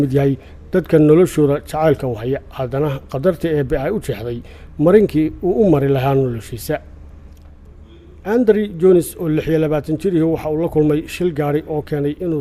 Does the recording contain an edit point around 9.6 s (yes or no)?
no